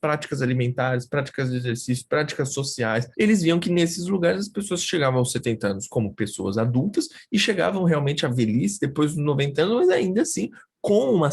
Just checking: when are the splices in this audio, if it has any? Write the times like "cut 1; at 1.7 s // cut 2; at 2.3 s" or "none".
cut 1; at 3.1 s